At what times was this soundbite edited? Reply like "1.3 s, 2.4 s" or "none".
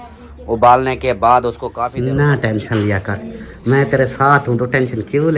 1.9 s